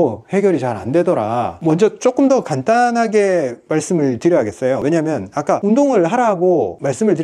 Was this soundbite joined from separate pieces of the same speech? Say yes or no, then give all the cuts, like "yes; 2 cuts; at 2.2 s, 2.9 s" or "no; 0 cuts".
yes; 1 cut; at 1.6 s